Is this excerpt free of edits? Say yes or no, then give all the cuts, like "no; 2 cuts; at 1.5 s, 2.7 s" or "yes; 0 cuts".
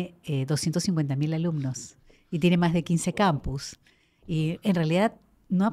yes; 0 cuts